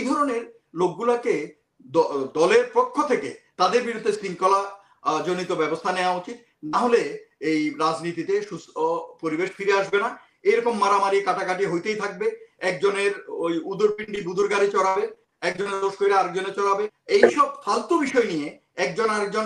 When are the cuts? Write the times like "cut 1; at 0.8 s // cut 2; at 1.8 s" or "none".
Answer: cut 1; at 16.9 s